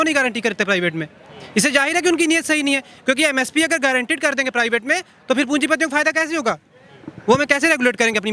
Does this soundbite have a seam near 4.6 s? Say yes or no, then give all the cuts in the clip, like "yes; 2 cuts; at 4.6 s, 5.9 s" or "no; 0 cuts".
no; 0 cuts